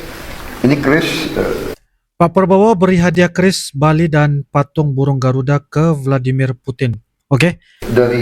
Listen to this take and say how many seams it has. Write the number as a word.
zero